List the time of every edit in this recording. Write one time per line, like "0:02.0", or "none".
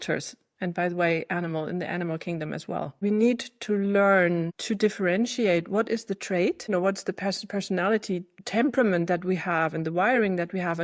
0:03.0
0:04.6
0:06.7
0:08.4